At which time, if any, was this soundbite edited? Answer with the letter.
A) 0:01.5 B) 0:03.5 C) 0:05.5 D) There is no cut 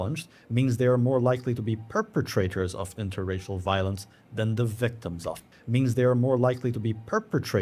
C